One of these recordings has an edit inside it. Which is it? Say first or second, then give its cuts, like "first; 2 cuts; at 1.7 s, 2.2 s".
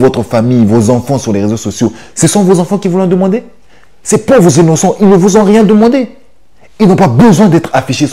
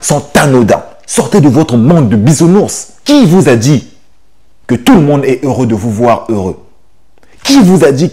second; 2 cuts; at 1.0 s, 2.9 s